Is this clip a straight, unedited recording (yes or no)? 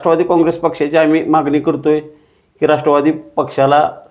yes